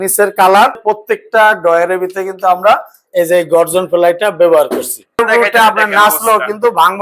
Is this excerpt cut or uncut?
cut